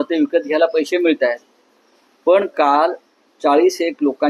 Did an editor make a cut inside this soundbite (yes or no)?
no